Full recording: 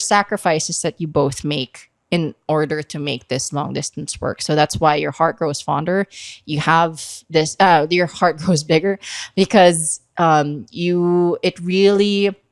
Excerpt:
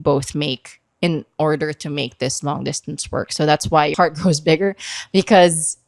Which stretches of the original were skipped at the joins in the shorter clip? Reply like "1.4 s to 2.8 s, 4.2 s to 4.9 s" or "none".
5.0 s to 8.2 s

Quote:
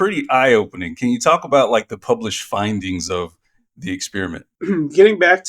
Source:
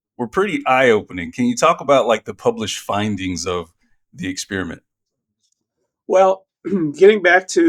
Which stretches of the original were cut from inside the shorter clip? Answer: 4.9 s to 6.5 s

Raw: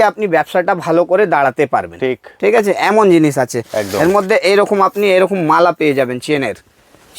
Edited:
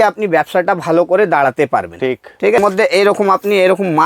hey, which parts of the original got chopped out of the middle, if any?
2.6 s to 4.1 s

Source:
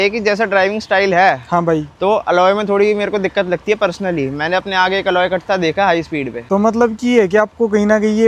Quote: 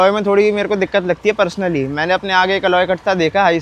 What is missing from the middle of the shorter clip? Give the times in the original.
none

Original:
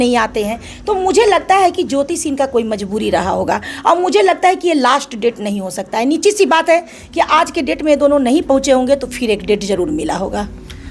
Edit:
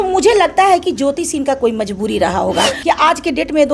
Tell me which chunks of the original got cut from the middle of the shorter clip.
3.6 s to 7.0 s

